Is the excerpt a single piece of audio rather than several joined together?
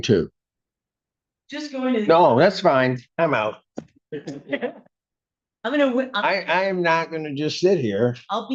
yes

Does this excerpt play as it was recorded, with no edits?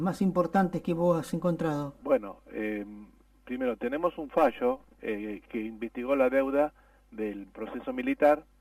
no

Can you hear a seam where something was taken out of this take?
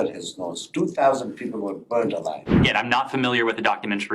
yes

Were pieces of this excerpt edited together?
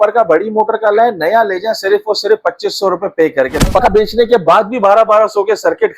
yes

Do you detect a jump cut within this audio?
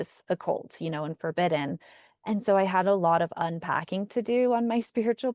no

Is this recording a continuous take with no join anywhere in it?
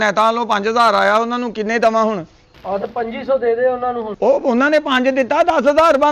yes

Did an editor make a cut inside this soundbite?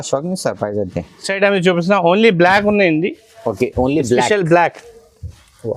no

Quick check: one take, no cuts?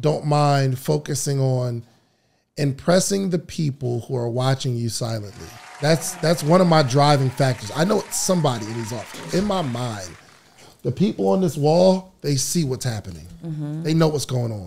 yes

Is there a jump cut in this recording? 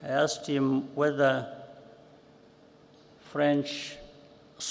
no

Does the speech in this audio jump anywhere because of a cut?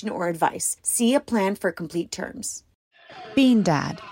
yes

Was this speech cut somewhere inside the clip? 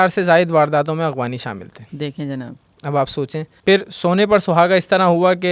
yes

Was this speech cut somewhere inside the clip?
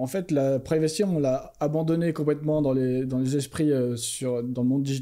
no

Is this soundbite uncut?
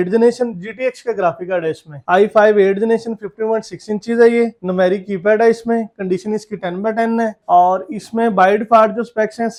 yes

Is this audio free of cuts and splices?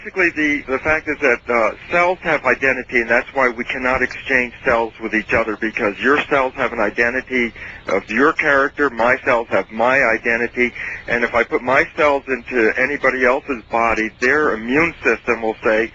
yes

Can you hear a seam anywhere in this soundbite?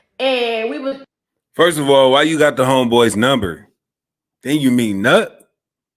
no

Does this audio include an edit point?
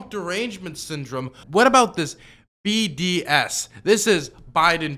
yes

